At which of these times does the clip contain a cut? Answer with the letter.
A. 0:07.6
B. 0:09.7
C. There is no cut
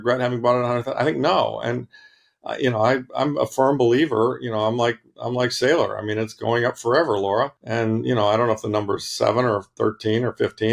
A